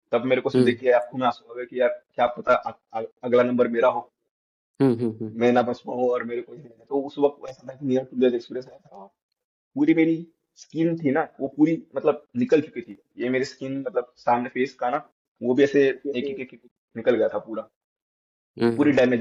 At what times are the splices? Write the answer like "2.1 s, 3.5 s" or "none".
none